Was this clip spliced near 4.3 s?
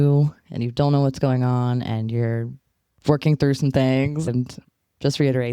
yes; 1 cut; at 4.3 s

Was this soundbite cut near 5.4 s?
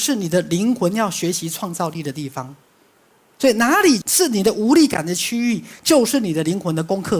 no; 1 cut; at 4.1 s

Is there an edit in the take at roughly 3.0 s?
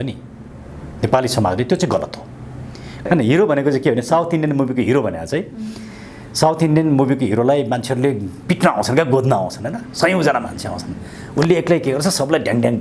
yes; 1 cut; at 3.0 s

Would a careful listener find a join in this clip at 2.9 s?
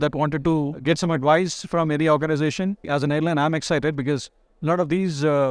yes; 1 cut; at 2.9 s

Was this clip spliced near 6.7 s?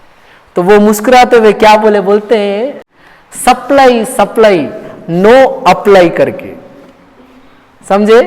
no; 1 cut; at 2.8 s

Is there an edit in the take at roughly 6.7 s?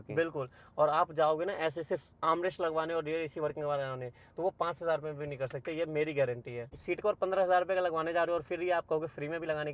yes; 1 cut; at 6.7 s

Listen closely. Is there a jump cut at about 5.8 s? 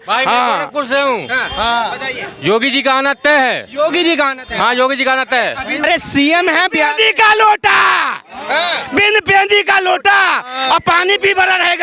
yes; 1 cut; at 5.8 s

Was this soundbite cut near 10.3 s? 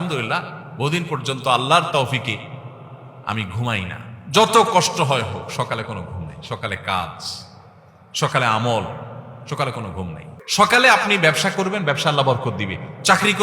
yes; 1 cut; at 10.3 s

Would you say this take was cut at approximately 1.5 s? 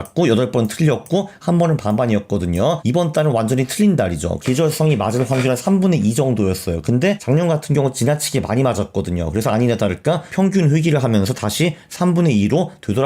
no; 4 cuts; at 2.8 s, 4.4 s, 7.2 s, 10.3 s

